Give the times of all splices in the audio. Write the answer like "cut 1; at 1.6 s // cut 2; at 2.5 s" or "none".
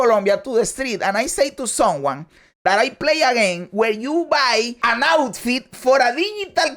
cut 1; at 4.8 s